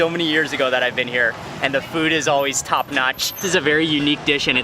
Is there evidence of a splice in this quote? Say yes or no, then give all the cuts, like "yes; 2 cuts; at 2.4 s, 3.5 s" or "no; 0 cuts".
yes; 1 cut; at 3.4 s